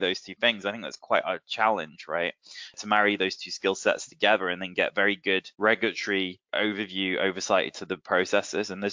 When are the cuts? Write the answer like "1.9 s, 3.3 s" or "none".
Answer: 2.8 s, 5.5 s, 6.4 s